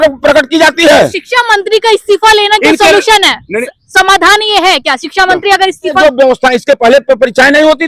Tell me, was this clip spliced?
yes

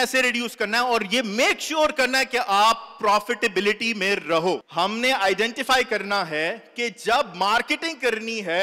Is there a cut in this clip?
no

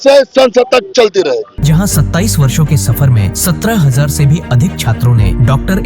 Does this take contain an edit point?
no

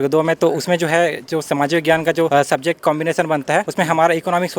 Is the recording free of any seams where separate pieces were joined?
no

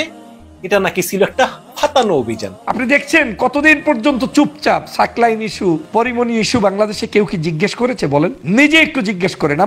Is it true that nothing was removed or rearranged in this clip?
no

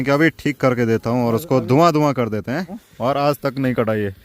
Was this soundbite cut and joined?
yes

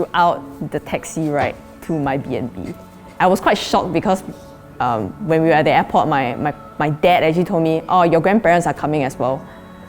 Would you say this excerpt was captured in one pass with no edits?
no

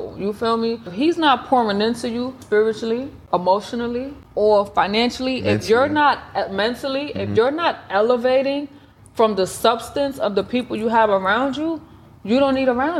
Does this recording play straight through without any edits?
no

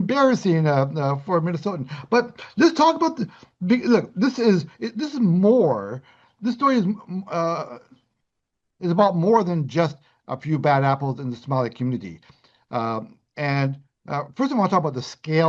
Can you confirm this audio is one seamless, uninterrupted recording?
yes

